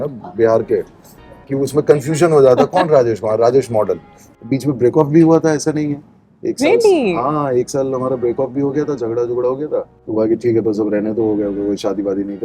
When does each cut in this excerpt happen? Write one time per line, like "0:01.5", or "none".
0:04.3
0:10.0